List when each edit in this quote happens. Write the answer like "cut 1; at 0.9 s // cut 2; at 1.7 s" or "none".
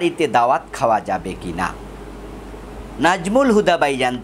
cut 1; at 2.6 s